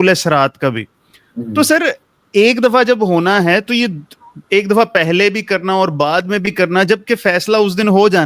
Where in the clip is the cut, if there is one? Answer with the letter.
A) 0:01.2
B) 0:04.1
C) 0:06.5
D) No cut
D